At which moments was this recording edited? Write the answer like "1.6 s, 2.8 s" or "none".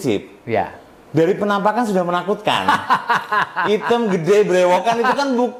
none